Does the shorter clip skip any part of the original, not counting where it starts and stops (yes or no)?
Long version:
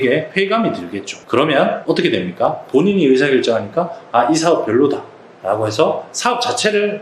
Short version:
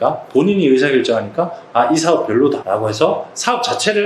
yes